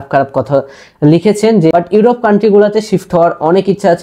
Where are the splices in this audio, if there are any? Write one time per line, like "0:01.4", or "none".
0:01.7